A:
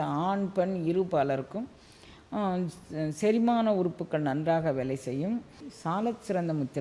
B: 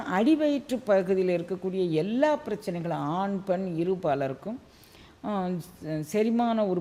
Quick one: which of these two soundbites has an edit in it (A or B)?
A